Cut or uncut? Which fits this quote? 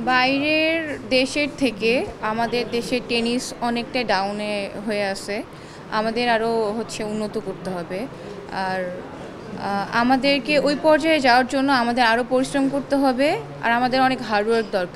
uncut